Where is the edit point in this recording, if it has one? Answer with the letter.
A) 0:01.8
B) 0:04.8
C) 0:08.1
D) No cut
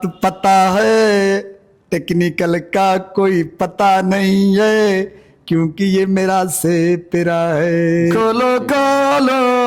C